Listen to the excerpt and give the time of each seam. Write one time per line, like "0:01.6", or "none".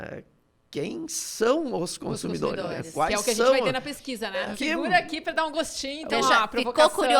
0:04.6